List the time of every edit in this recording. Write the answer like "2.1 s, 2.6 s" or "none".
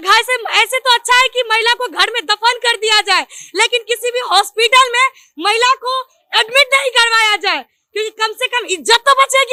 none